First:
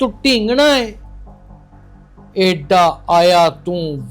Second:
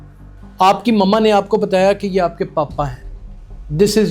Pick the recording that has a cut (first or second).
first